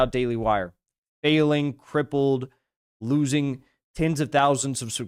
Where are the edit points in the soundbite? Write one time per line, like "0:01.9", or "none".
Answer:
none